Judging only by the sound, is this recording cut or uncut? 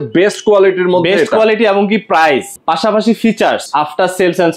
cut